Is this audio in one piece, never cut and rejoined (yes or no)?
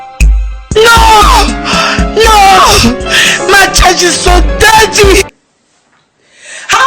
no